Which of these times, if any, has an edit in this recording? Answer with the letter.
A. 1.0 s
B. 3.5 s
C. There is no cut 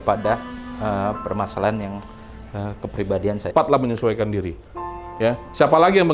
B